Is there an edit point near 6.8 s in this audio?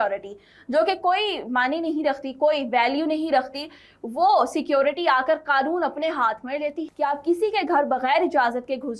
yes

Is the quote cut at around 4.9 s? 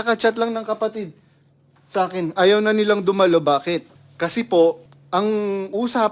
yes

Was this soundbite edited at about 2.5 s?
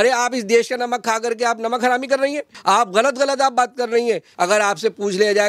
yes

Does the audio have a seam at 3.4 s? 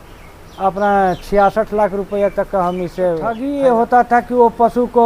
yes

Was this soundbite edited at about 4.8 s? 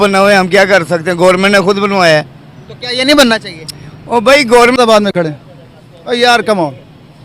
yes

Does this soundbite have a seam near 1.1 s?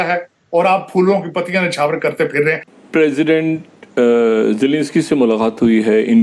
no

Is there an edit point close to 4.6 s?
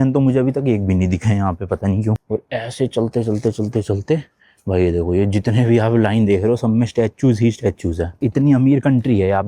no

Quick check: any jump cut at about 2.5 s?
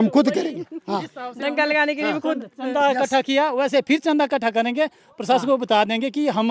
no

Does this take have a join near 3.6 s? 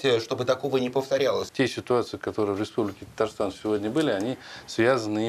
no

